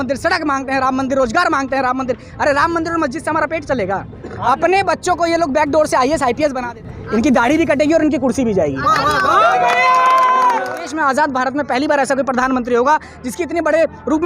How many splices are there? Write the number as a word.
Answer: two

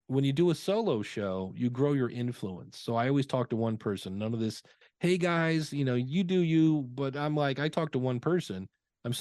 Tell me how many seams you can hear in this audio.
zero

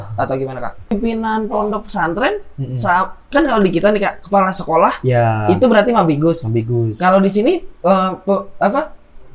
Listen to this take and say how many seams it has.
one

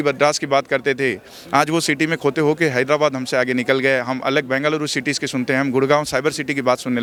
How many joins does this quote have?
zero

